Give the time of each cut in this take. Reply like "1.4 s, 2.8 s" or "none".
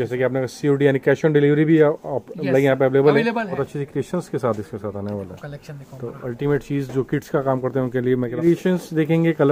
3.6 s, 8.4 s